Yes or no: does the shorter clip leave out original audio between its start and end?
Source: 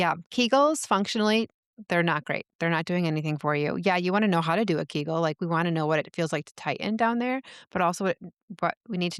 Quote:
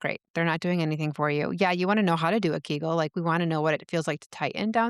no